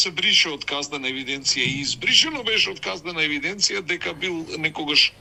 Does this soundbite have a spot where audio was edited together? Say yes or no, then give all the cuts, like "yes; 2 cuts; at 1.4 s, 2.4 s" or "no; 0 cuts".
no; 0 cuts